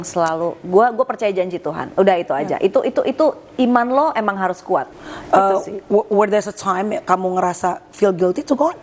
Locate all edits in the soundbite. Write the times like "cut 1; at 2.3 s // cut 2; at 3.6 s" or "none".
cut 1; at 4.9 s